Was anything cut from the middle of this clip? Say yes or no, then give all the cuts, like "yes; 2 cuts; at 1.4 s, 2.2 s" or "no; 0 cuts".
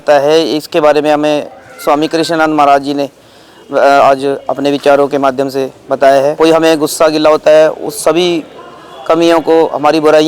yes; 1 cut; at 6.3 s